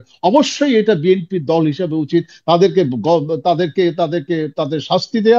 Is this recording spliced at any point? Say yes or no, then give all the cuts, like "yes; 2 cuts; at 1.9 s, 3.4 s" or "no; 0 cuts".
no; 0 cuts